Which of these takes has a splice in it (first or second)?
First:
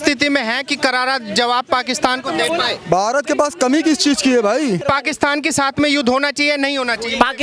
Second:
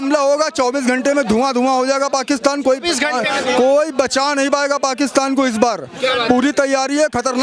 first